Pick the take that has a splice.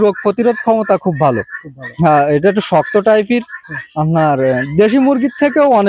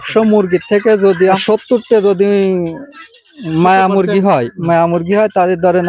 second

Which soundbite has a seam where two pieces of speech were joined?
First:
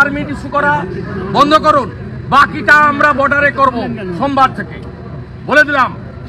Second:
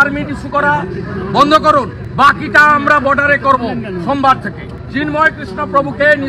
second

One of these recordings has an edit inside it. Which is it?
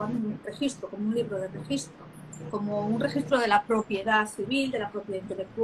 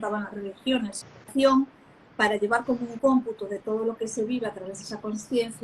second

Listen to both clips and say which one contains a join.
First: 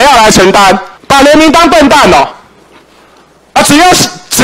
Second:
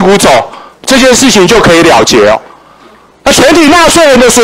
first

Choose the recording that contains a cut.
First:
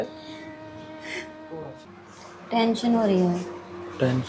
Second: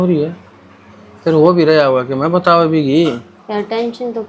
first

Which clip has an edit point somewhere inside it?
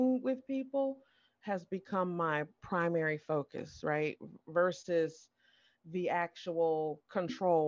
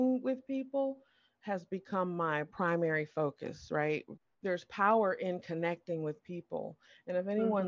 second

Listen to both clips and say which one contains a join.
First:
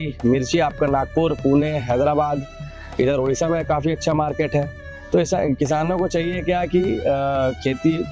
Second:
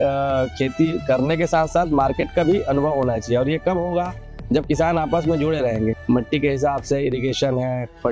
second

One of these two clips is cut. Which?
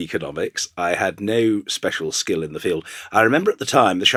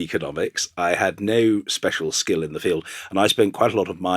second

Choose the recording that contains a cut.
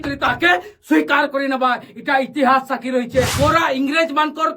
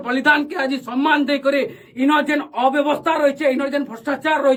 first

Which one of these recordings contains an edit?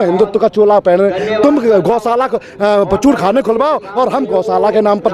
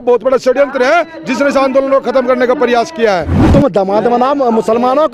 second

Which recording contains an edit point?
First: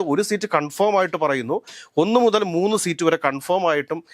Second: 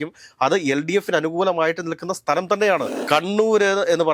second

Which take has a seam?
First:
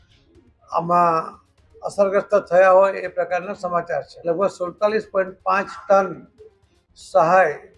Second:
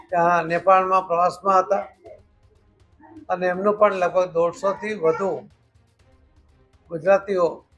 first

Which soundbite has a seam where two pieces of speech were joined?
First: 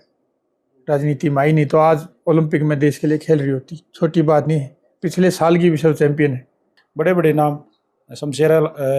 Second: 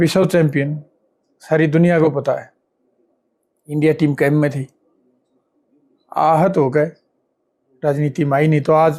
first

